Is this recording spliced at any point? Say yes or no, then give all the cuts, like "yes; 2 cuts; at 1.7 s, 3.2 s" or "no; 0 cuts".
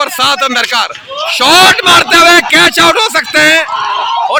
no; 0 cuts